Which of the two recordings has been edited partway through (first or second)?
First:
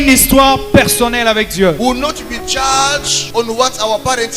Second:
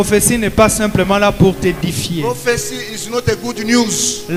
first